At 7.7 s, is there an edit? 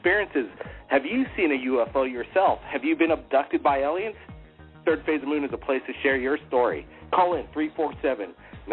no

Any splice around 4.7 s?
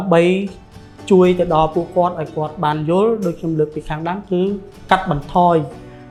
no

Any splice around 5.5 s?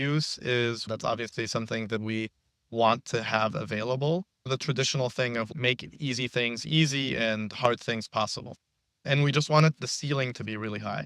yes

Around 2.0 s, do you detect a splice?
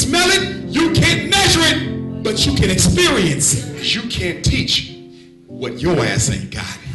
no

